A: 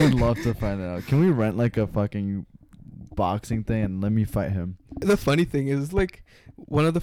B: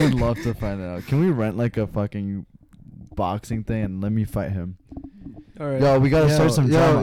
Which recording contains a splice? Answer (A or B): A